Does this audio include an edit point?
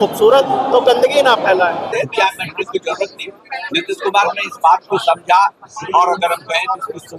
yes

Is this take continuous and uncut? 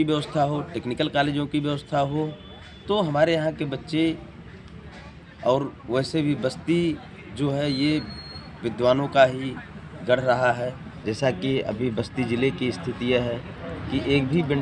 no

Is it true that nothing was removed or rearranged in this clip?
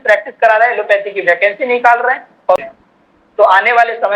no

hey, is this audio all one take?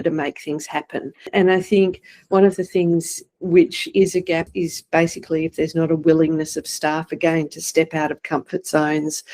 no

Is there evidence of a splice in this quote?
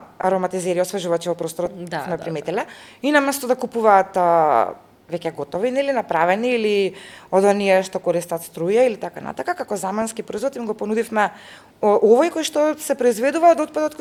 no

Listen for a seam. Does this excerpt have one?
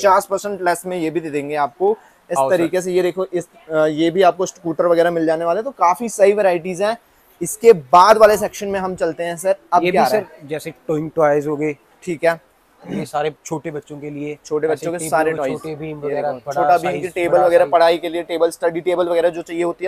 no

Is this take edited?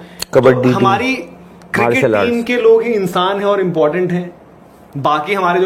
no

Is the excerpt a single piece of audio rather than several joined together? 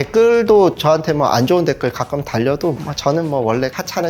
yes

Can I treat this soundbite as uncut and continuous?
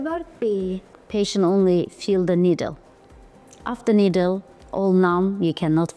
no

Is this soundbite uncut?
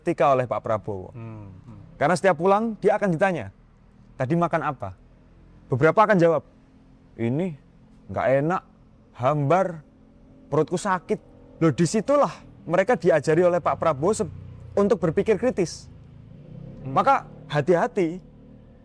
yes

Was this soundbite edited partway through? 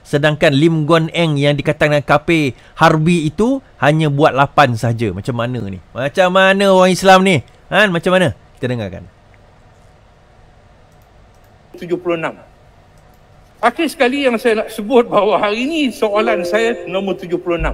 no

